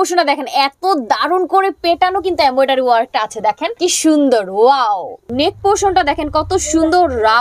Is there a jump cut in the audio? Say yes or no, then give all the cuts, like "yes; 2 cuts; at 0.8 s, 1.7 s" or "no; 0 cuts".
yes; 2 cuts; at 3.7 s, 5.3 s